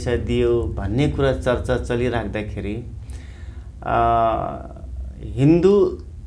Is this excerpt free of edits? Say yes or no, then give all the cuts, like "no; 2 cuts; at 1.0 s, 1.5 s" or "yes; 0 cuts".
yes; 0 cuts